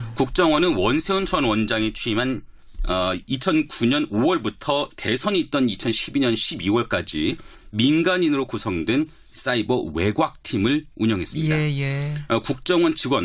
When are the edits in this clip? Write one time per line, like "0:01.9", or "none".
0:03.9